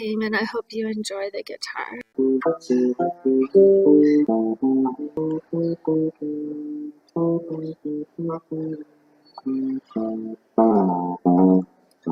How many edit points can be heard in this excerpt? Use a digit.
0